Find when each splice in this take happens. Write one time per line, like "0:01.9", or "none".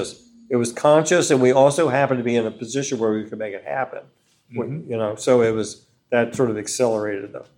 none